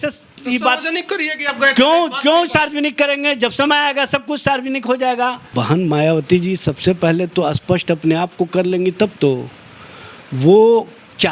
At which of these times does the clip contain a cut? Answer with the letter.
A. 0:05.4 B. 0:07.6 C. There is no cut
A